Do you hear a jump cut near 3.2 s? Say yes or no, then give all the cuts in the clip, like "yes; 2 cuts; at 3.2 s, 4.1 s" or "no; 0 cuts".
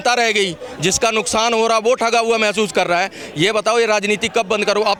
no; 0 cuts